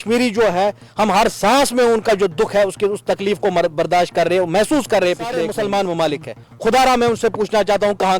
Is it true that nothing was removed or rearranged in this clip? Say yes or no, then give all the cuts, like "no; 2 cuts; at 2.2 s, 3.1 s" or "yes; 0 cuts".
no; 1 cut; at 5.5 s